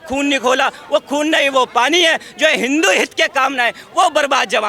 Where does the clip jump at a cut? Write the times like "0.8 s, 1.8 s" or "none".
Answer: none